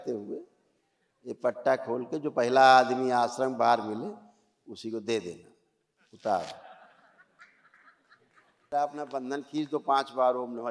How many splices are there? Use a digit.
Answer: 1